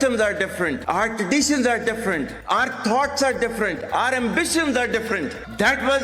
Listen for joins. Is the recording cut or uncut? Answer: uncut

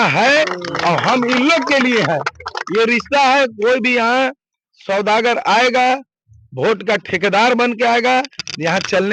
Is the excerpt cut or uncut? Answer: uncut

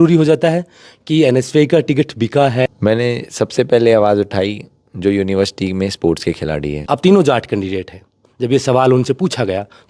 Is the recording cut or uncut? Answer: cut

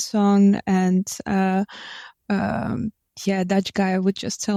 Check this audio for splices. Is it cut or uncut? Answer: uncut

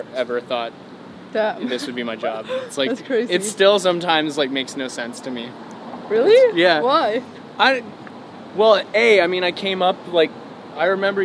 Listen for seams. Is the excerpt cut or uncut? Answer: uncut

